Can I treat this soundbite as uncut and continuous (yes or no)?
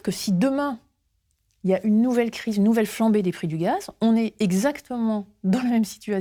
yes